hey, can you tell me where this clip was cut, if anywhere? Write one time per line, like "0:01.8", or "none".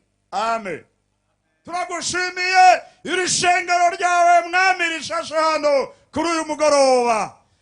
0:01.5